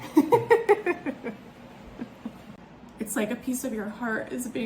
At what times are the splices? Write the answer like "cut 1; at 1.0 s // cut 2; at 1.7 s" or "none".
cut 1; at 2.5 s